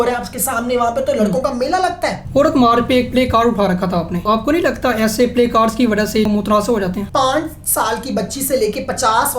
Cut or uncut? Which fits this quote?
cut